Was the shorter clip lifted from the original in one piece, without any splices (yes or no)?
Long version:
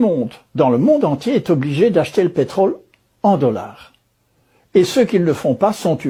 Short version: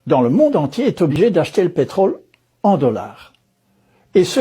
no